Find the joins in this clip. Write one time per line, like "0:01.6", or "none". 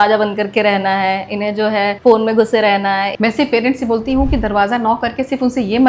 0:02.0
0:03.1